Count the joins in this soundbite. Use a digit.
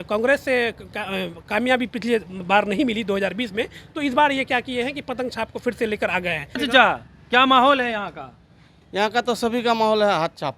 1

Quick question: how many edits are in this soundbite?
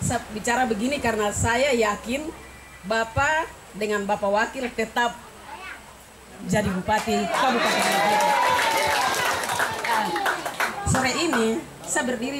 0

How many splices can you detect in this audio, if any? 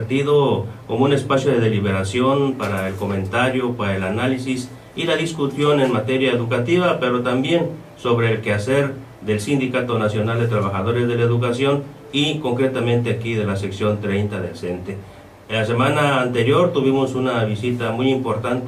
1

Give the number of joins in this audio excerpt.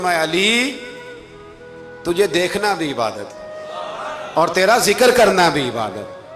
0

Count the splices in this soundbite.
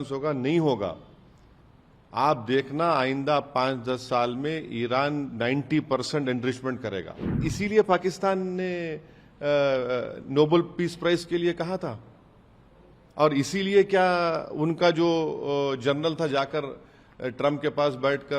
1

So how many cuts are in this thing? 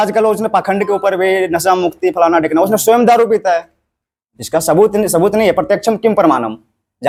0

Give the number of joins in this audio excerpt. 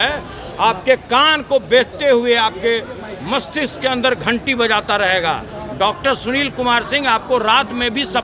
0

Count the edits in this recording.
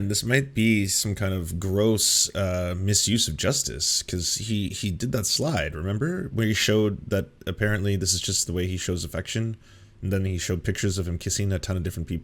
0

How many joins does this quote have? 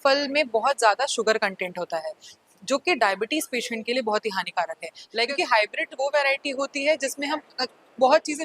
1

